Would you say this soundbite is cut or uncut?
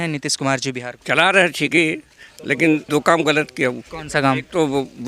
cut